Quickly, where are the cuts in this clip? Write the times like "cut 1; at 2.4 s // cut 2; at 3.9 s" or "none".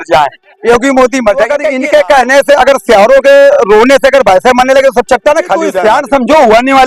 cut 1; at 1.6 s // cut 2; at 5.7 s